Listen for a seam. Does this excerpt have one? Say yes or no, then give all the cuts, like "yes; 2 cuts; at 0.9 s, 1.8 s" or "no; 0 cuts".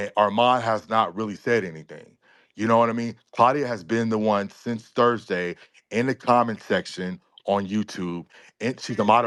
no; 0 cuts